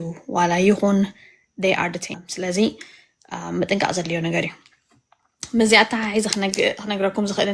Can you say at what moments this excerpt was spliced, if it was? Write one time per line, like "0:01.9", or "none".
0:02.1